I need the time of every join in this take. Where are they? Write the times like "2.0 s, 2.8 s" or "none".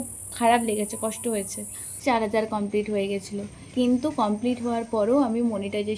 2.0 s, 4.0 s

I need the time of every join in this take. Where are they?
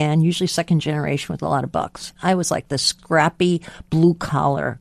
2.1 s, 2.9 s

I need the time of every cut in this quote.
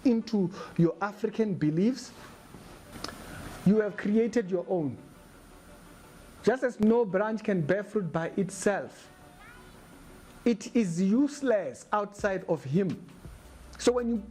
none

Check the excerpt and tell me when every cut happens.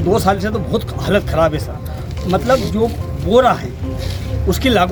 none

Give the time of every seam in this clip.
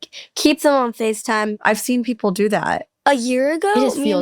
1.5 s, 2.9 s

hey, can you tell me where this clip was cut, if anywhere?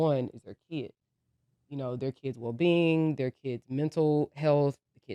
none

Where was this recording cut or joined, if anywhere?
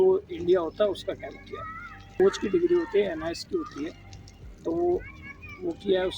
2.2 s

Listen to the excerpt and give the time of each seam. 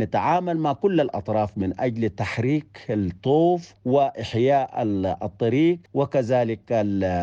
3.7 s, 5.8 s

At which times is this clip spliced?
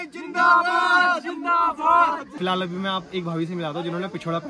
2.4 s

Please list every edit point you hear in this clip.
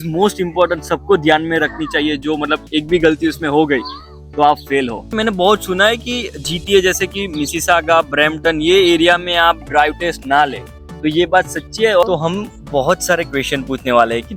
5.2 s, 12.0 s

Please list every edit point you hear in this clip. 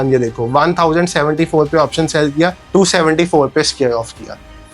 none

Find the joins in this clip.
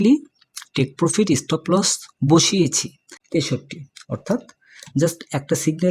3.1 s

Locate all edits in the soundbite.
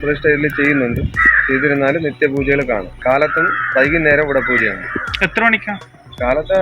3.0 s

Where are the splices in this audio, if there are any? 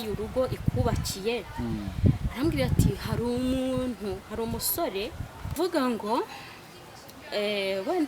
5.6 s

